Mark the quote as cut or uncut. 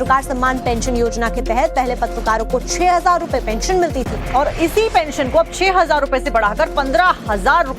cut